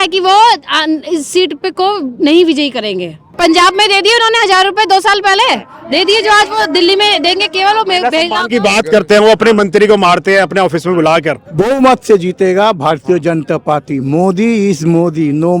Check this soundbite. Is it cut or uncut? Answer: cut